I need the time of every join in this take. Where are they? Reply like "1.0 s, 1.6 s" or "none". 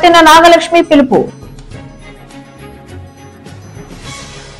none